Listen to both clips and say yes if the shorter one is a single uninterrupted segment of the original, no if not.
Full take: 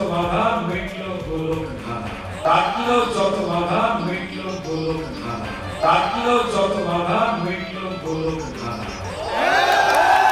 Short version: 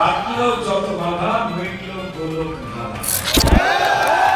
no